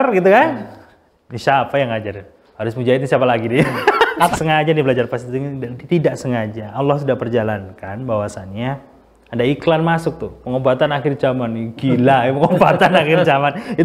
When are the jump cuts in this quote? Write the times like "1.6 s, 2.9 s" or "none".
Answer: 4.3 s